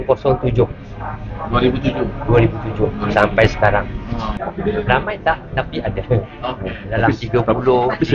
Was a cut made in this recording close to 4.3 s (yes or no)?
yes